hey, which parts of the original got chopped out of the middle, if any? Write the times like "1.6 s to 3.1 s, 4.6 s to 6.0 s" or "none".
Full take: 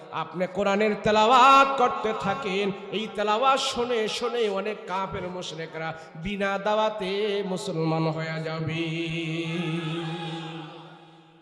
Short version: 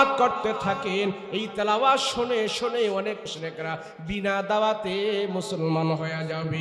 4.9 s to 5.4 s